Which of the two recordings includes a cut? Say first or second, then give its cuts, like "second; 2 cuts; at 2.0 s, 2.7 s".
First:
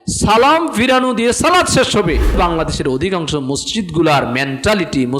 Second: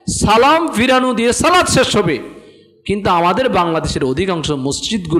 first; 1 cut; at 2.4 s